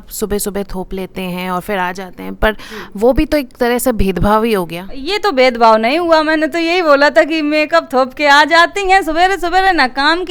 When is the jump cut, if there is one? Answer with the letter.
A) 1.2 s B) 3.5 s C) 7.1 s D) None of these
D